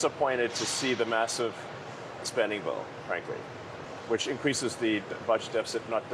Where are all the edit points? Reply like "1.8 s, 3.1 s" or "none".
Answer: none